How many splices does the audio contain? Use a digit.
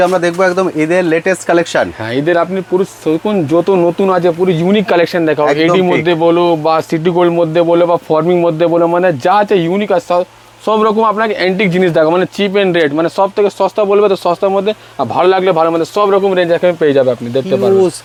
0